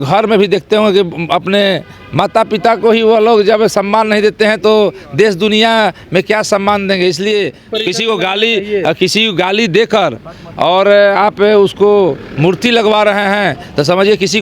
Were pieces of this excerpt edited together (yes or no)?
yes